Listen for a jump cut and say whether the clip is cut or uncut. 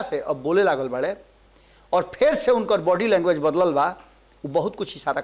uncut